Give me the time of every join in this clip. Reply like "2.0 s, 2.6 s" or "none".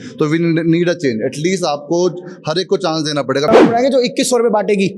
3.5 s